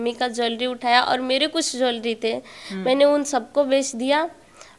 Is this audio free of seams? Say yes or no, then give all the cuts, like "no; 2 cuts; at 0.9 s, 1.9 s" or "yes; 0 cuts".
yes; 0 cuts